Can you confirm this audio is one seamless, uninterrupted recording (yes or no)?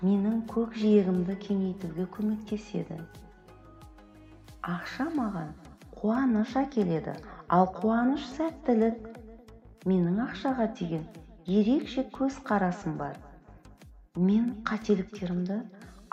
yes